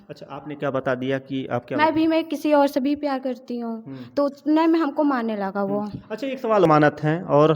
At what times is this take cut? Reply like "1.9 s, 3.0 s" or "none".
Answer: 6.7 s